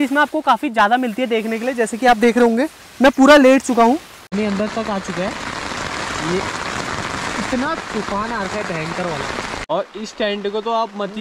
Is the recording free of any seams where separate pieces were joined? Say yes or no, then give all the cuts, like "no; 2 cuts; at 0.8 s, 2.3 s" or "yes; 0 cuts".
no; 2 cuts; at 4.2 s, 9.6 s